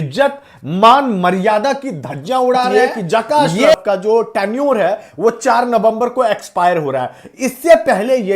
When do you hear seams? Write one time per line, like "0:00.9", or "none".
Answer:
0:02.7